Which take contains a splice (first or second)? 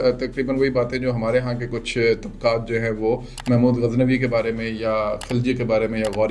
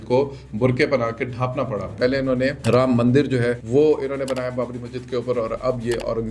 second